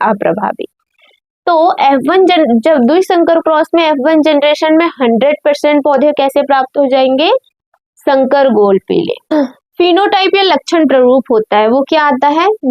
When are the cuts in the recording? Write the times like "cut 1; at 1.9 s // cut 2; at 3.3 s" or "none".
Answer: cut 1; at 9.3 s